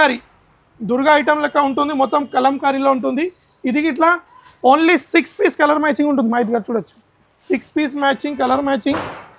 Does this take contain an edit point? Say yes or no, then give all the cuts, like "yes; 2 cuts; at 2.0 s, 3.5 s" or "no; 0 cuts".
no; 0 cuts